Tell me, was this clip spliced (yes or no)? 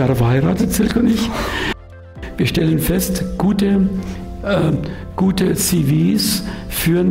yes